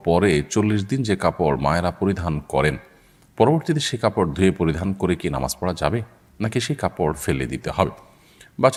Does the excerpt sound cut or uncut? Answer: uncut